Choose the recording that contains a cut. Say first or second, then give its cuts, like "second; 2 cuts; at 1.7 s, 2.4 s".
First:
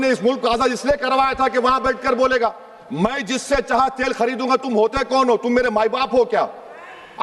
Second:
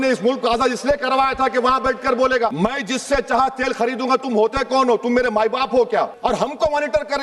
second; 2 cuts; at 2.5 s, 6.1 s